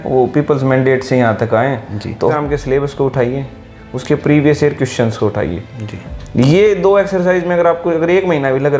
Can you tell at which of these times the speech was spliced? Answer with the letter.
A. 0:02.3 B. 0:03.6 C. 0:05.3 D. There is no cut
A